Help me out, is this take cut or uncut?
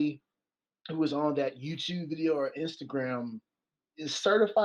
uncut